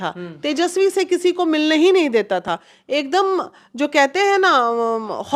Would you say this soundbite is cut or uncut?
uncut